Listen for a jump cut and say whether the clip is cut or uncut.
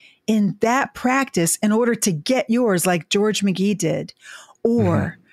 uncut